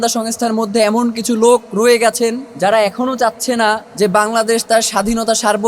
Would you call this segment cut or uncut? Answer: cut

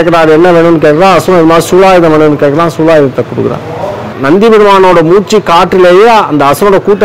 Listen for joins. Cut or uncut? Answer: cut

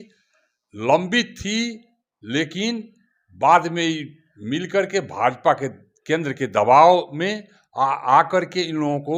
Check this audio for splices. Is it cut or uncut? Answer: uncut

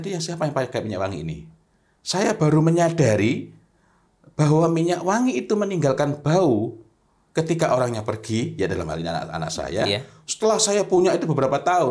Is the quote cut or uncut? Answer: uncut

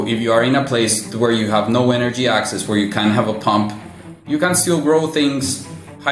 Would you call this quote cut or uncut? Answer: uncut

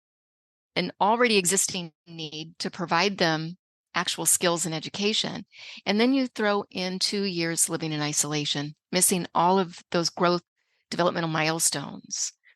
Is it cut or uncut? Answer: uncut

